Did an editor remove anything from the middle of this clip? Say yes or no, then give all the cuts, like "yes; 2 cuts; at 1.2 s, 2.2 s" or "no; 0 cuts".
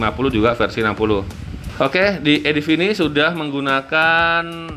yes; 1 cut; at 1.6 s